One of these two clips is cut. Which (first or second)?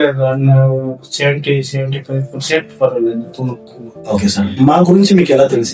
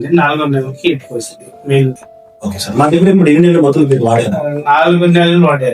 second